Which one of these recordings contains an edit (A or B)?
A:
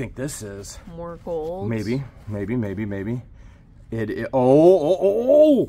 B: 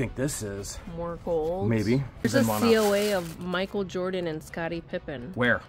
B